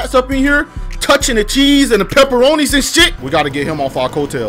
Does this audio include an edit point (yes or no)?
yes